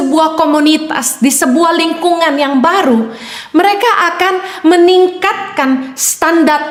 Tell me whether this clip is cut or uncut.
uncut